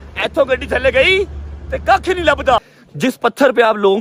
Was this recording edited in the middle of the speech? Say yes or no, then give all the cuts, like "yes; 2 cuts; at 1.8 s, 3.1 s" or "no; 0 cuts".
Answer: yes; 1 cut; at 2.8 s